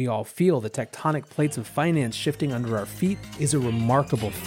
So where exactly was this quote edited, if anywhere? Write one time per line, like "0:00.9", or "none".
0:03.3